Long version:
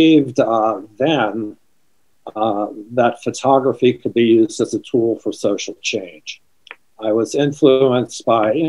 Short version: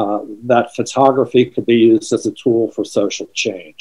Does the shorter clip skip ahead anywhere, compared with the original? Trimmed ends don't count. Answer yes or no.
no